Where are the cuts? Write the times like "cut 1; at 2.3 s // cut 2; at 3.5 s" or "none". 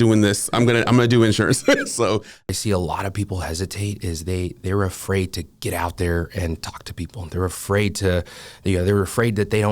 cut 1; at 2.5 s